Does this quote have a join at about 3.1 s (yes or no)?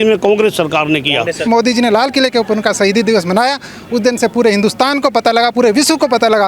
no